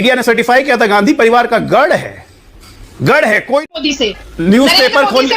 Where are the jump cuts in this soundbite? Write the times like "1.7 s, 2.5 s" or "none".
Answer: 3.7 s